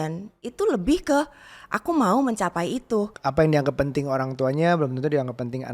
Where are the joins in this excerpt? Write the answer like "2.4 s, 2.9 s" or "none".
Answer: 3.1 s

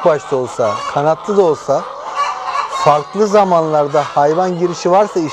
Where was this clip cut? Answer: none

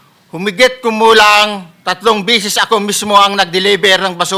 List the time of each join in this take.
none

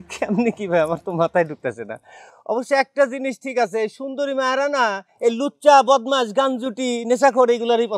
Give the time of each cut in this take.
none

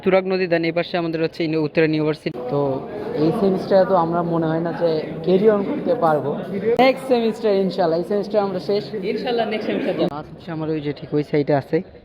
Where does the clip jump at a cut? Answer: 2.3 s, 6.8 s, 10.1 s

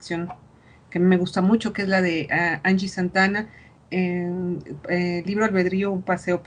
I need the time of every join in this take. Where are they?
2.5 s

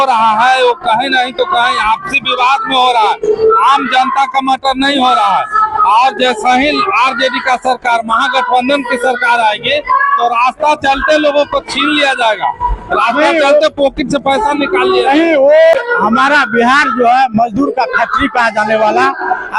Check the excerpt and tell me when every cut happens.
15.7 s

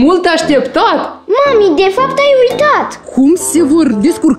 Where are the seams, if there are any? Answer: 1.1 s, 3.0 s

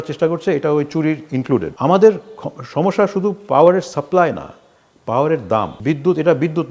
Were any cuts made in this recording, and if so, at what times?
1.7 s, 5.7 s

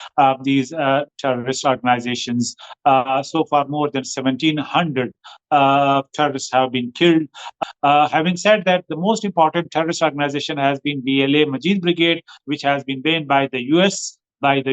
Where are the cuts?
7.5 s

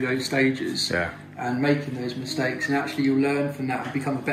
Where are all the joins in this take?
none

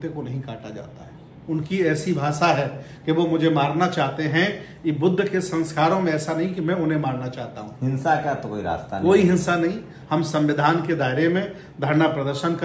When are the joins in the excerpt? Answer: none

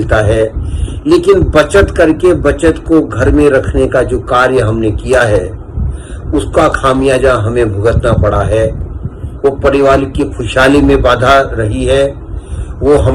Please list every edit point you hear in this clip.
none

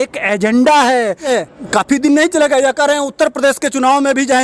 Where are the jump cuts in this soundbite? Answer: 1.3 s

